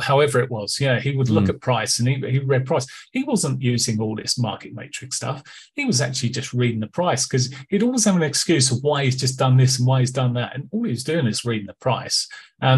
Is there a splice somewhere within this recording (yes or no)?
no